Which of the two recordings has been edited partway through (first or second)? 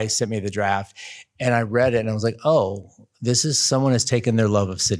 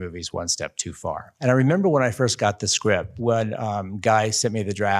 second